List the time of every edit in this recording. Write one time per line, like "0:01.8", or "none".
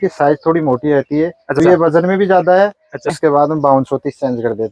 0:01.6
0:03.1